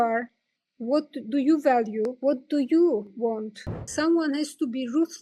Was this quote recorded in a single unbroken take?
no; 1 cut; at 3.9 s

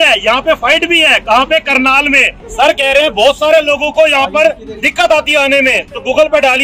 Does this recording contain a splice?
yes; 1 cut; at 2.4 s

